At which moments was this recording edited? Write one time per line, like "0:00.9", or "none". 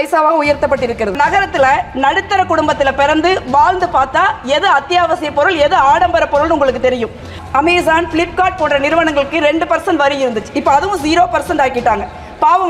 0:01.2
0:07.3